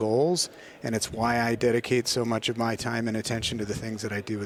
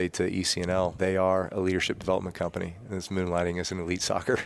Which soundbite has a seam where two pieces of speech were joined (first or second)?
second